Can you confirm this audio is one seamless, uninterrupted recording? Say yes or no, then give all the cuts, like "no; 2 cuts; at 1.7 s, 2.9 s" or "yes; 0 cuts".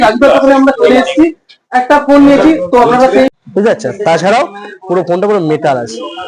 no; 1 cut; at 3.3 s